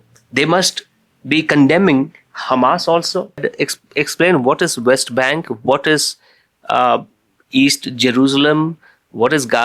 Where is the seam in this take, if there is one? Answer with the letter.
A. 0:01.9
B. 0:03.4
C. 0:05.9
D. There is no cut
B